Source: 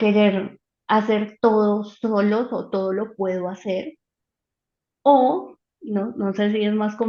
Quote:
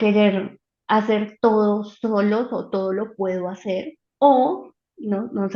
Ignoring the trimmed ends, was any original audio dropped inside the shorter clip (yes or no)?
yes